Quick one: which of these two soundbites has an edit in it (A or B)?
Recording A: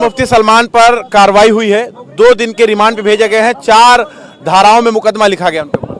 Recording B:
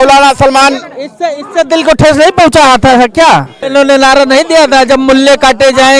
B